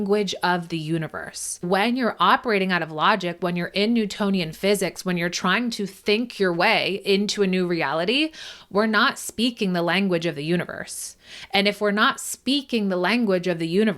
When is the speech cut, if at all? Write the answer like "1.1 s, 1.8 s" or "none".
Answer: 1.6 s